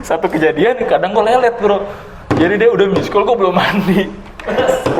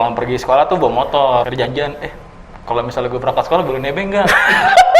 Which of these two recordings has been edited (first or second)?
second